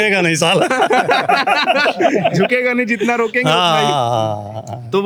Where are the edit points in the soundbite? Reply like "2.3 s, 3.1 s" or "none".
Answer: none